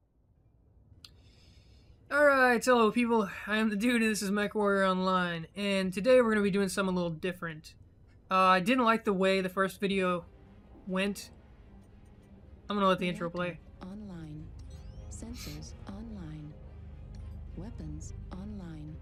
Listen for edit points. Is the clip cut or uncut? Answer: uncut